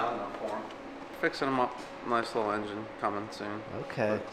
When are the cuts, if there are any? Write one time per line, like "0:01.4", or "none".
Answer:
0:01.0